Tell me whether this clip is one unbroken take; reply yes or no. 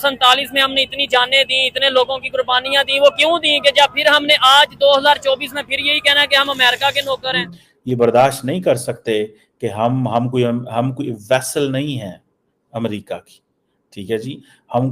no